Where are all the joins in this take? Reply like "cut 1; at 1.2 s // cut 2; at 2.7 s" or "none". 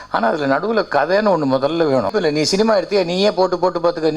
cut 1; at 2.1 s